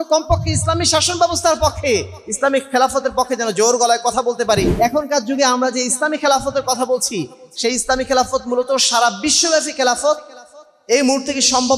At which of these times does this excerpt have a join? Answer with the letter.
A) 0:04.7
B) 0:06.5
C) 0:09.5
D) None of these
A